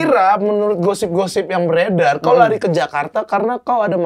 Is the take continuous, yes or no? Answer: yes